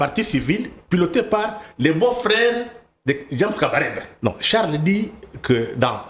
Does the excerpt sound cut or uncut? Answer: cut